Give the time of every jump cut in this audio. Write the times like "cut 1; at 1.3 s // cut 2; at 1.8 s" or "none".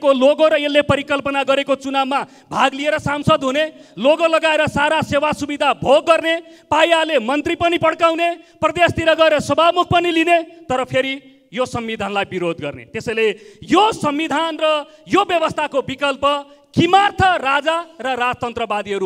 none